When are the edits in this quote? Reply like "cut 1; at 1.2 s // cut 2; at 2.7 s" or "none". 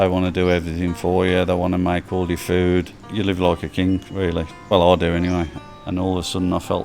cut 1; at 3.1 s // cut 2; at 4.6 s // cut 3; at 5.6 s